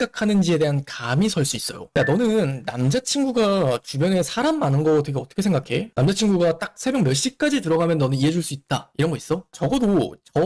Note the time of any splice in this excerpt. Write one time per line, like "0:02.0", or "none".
0:01.8
0:05.9
0:09.5